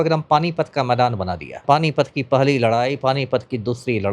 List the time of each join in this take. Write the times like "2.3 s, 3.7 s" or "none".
1.6 s

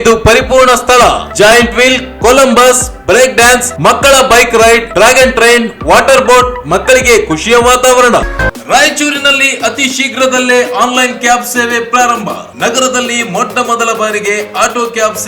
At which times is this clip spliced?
8.3 s

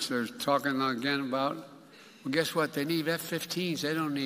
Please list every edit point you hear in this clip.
none

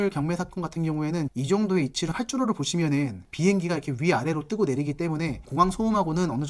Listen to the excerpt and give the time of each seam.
2.1 s

